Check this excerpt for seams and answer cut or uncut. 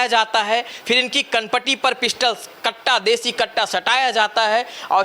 uncut